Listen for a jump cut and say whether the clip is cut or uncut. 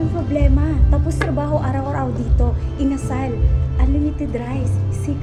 uncut